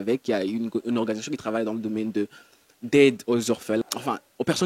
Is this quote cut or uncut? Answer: uncut